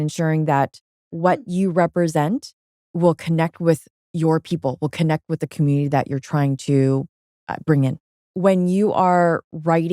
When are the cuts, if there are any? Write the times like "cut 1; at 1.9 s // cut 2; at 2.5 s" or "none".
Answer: cut 1; at 8.1 s